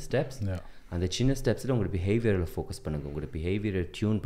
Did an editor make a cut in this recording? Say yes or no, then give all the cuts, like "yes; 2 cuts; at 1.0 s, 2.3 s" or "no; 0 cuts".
no; 0 cuts